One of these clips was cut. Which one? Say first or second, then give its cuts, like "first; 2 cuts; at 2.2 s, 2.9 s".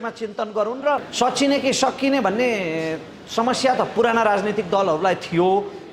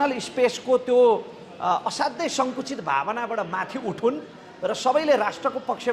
first; 1 cut; at 1.1 s